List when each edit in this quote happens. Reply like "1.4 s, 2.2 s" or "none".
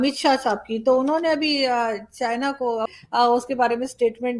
2.9 s